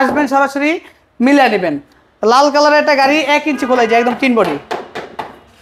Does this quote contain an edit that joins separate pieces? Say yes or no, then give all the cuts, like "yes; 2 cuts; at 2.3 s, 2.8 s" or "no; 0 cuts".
no; 0 cuts